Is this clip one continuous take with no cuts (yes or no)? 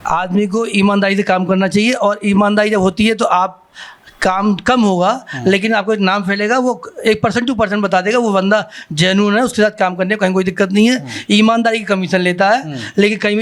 yes